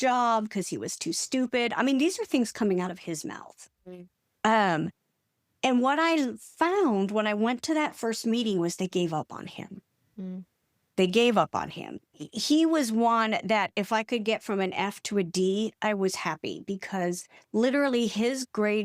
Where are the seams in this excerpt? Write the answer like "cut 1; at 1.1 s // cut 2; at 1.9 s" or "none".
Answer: cut 1; at 11.9 s